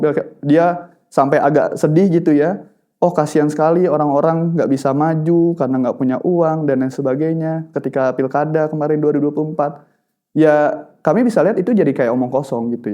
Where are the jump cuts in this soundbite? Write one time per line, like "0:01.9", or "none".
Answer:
none